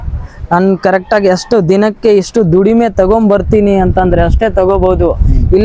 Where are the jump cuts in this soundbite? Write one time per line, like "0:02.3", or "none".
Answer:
none